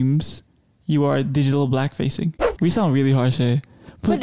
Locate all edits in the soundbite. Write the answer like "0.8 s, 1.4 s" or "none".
2.4 s